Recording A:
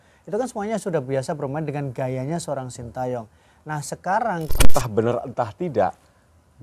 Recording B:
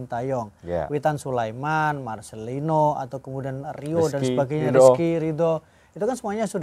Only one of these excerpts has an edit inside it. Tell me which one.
A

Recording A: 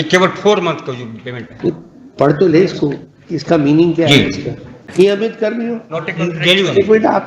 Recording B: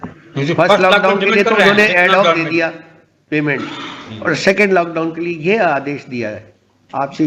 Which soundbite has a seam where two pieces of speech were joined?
A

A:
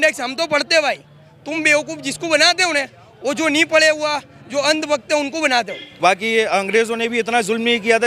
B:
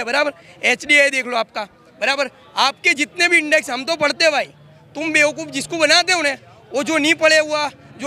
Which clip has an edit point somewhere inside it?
A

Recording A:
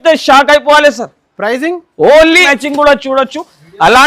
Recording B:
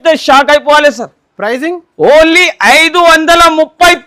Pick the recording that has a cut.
A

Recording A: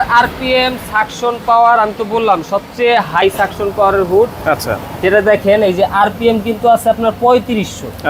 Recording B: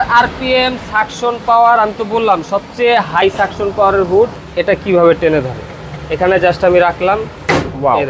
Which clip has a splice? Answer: B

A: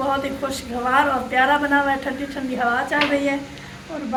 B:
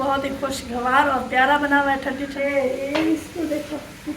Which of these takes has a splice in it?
B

